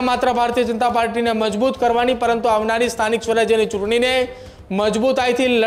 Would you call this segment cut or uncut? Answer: uncut